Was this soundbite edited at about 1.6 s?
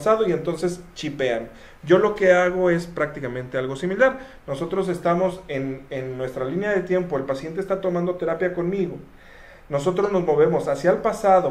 no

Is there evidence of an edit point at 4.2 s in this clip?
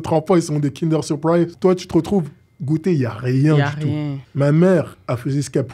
yes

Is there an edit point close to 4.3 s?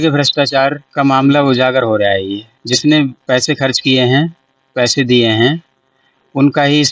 no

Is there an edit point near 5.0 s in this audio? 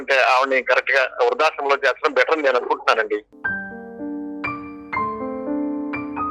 no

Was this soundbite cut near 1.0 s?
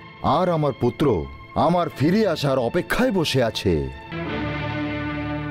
no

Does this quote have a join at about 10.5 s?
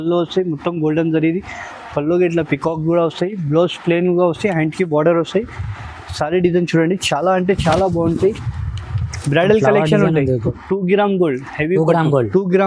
yes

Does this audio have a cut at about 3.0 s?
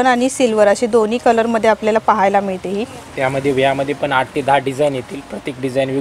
yes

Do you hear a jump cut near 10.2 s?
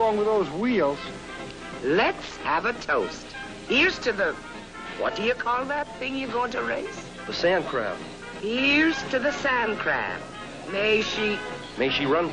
yes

